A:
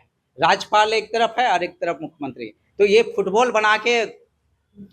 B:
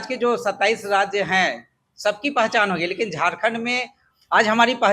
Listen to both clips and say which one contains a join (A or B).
B